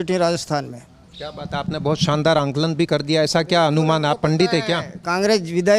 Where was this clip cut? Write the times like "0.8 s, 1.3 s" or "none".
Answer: none